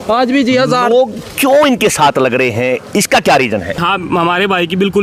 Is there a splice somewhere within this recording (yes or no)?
yes